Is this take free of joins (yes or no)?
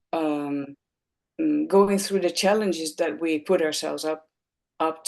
yes